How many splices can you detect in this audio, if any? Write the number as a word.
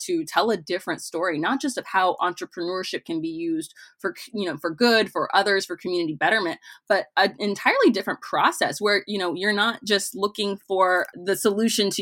one